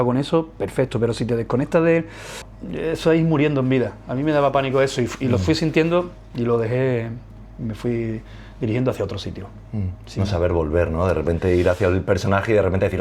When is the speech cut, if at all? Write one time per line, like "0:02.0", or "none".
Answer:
0:02.4